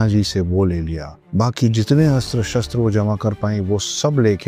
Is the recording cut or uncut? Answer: uncut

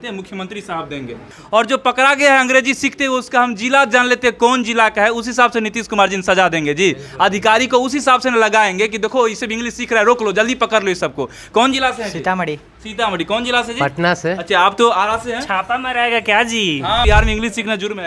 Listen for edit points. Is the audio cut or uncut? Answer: cut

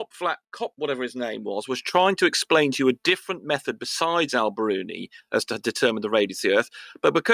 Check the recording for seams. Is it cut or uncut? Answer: uncut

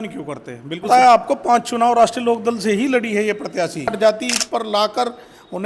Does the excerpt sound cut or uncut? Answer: cut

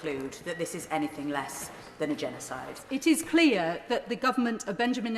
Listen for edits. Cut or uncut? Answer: cut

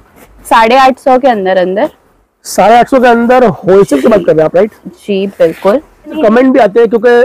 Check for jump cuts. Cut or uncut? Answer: cut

